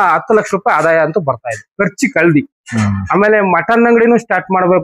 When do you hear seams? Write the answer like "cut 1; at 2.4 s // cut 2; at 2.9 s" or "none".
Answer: none